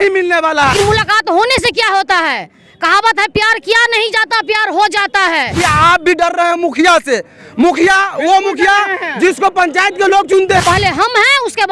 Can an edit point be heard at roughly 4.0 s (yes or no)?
no